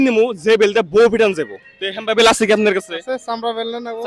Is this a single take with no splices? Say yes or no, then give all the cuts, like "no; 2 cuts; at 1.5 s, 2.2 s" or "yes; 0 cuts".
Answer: no; 1 cut; at 1.6 s